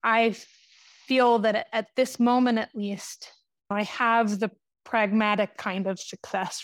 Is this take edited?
yes; 1 cut; at 3.7 s

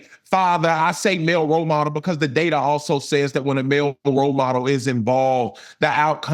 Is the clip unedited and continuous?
yes; 0 cuts

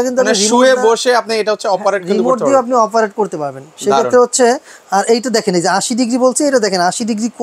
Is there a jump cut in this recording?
no; 0 cuts

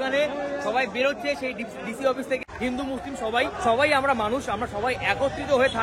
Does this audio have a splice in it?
yes; 2 cuts; at 2.4 s, 3.6 s

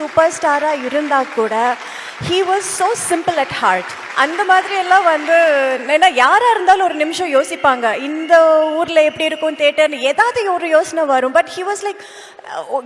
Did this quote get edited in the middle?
no; 0 cuts

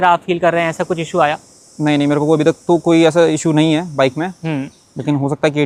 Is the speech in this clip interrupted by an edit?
no; 0 cuts

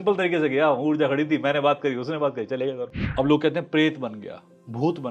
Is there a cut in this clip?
yes; 1 cut; at 2.9 s

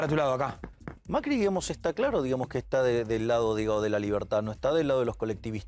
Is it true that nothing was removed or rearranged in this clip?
yes; 0 cuts

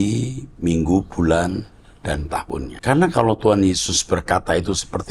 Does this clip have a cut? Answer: yes; 1 cut; at 2.7 s

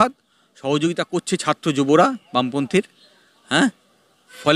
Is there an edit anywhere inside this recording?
no; 0 cuts

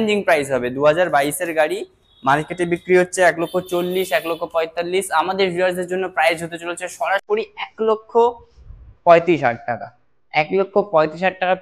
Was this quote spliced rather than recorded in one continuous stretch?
no; 0 cuts

